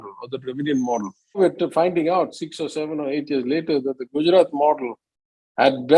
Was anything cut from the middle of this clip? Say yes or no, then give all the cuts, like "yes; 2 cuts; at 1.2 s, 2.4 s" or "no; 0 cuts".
yes; 1 cut; at 1.4 s